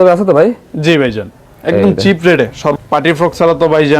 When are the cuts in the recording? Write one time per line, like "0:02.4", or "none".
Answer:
0:02.8